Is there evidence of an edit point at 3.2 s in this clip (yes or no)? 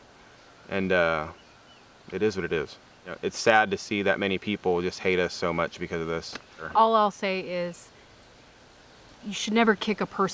yes